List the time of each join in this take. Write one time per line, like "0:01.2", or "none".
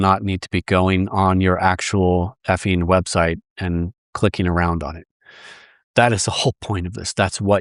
none